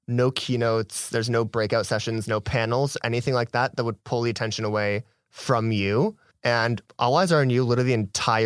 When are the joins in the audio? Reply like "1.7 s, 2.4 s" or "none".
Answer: 6.3 s

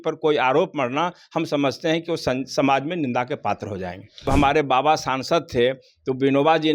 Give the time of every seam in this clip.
4.2 s

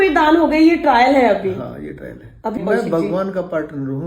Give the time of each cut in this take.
2.6 s

